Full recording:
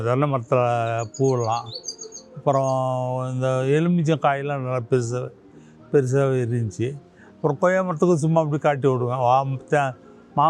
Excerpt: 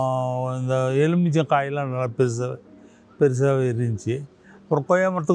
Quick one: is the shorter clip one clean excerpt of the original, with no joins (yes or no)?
yes